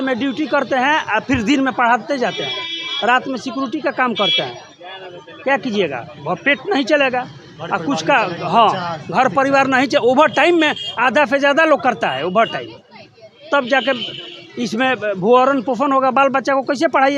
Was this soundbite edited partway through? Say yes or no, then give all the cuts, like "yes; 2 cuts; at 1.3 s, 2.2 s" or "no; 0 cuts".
no; 0 cuts